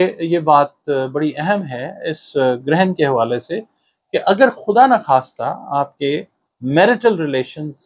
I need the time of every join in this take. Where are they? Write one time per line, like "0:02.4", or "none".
none